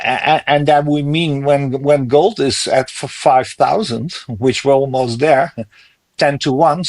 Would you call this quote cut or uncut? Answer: uncut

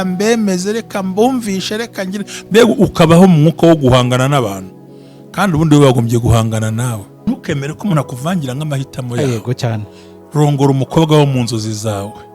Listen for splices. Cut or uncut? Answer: cut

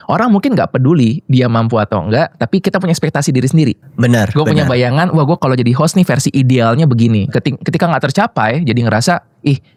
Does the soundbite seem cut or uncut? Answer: uncut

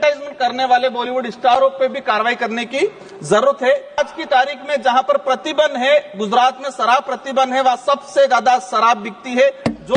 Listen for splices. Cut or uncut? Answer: cut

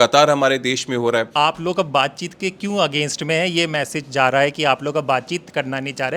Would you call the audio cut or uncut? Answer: cut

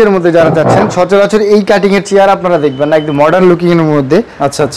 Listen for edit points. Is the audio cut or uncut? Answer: uncut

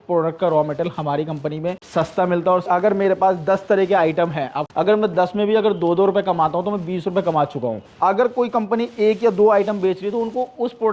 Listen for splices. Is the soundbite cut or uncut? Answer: cut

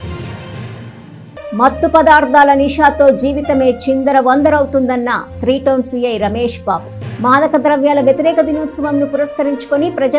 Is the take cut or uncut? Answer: uncut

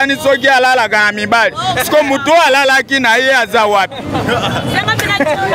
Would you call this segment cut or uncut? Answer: uncut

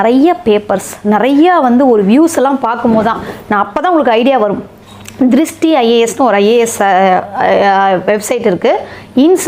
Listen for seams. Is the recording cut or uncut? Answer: uncut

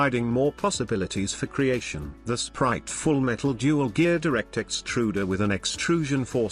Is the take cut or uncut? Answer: cut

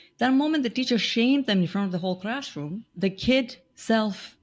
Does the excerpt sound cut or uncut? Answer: cut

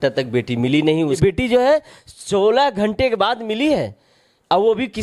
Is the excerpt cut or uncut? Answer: cut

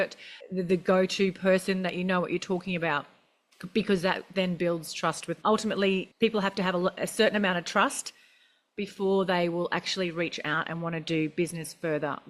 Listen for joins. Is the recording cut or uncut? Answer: uncut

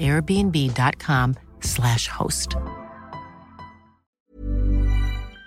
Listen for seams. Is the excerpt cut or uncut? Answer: cut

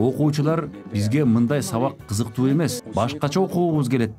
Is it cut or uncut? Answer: cut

